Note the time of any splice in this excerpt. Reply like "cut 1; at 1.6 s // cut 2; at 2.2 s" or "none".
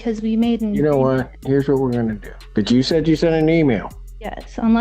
cut 1; at 1.3 s // cut 2; at 2.3 s